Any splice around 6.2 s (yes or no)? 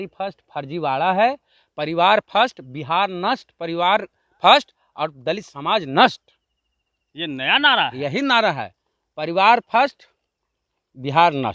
no